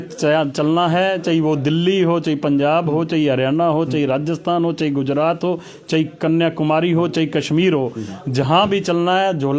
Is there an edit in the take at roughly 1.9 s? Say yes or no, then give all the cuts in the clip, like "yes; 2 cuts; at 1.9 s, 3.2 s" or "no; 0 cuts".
no; 0 cuts